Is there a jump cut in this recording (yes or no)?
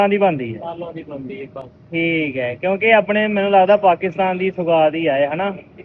no